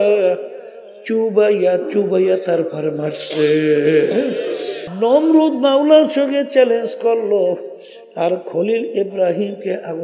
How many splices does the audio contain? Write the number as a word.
one